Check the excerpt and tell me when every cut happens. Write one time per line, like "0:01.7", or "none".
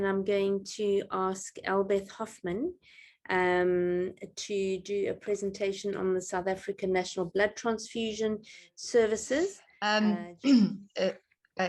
0:09.7